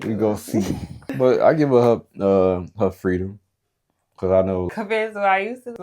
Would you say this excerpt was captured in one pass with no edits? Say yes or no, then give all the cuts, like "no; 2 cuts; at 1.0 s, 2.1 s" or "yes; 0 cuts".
no; 1 cut; at 4.7 s